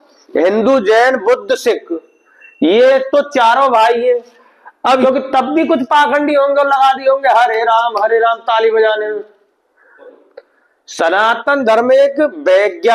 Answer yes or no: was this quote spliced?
yes